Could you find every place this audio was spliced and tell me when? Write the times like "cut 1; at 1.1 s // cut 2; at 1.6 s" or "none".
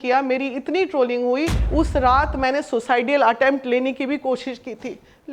cut 1; at 1.6 s